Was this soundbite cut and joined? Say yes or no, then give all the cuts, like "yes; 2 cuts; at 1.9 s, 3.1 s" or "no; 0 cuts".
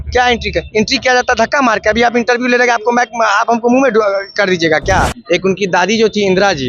yes; 1 cut; at 5.2 s